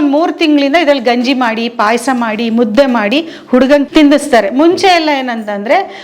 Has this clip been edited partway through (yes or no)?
no